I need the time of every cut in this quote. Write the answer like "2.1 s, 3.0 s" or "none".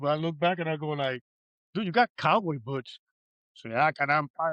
none